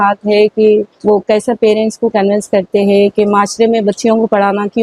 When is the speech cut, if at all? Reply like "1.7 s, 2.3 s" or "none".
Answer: 0.9 s